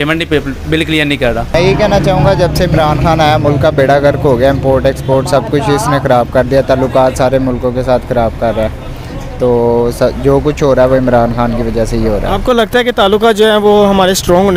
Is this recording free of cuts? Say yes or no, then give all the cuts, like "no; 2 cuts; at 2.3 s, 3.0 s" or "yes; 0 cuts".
yes; 0 cuts